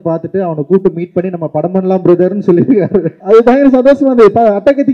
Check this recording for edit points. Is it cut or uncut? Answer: cut